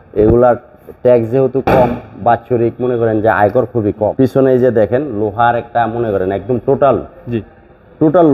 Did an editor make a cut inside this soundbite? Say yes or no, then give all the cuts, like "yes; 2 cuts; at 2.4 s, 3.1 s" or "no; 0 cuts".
yes; 1 cut; at 4.1 s